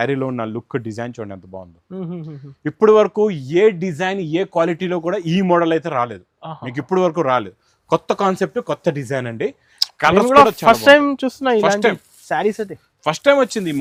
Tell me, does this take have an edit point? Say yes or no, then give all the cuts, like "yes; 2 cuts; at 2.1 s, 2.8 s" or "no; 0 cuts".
no; 0 cuts